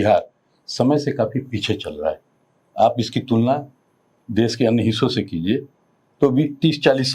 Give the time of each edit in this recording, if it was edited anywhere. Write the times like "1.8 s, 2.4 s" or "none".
none

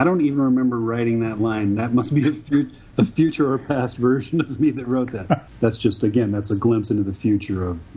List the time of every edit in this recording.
5.5 s

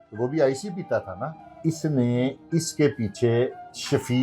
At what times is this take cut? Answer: 1.6 s

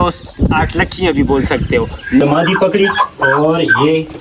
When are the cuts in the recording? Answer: 2.2 s

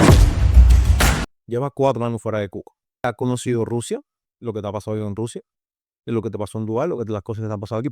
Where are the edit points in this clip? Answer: 1.3 s, 3.0 s

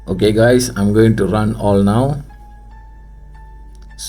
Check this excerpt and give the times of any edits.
none

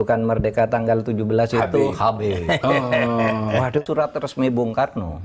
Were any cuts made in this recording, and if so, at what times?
3.8 s

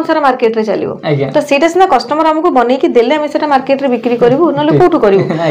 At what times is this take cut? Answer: none

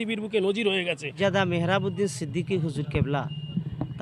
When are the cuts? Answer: 1.1 s

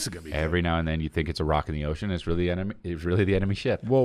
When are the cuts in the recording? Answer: none

